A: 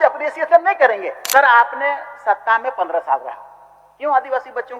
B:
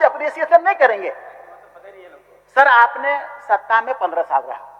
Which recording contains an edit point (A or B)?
A